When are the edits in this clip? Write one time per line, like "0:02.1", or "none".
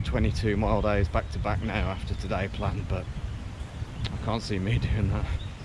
none

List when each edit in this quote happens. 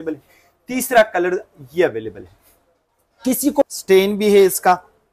0:03.6

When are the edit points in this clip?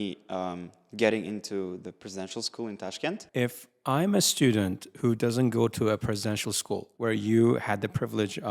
0:03.2
0:06.9

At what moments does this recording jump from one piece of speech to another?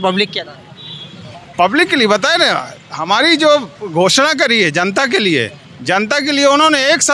none

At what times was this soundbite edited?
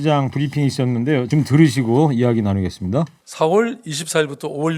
0:01.3
0:03.2

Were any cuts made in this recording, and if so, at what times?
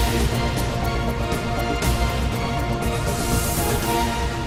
none

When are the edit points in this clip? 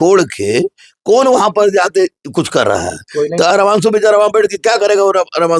0:03.5

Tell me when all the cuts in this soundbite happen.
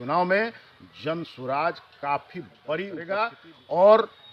0:03.1

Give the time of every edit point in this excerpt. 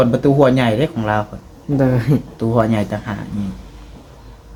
none

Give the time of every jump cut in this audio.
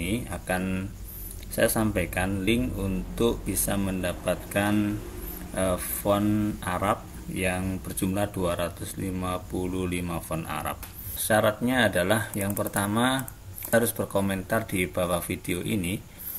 0:11.1
0:13.7

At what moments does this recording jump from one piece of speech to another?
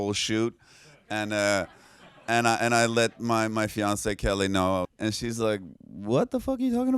0:04.9

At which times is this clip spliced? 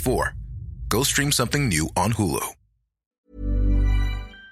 0:03.3

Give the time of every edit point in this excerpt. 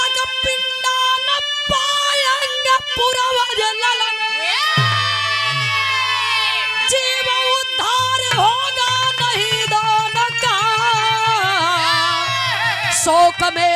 none

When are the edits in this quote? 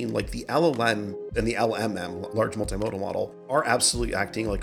0:01.3
0:02.3
0:03.5

